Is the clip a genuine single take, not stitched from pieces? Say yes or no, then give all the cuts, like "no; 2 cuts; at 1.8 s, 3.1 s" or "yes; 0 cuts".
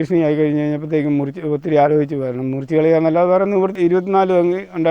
no; 1 cut; at 3.7 s